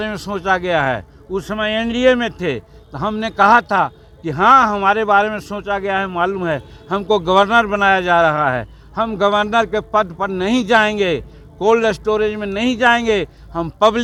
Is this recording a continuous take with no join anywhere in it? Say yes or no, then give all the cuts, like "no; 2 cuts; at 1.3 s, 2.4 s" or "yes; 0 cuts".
yes; 0 cuts